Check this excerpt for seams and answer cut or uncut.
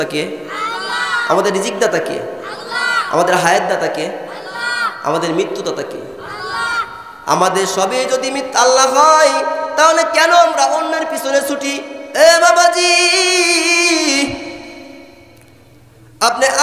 cut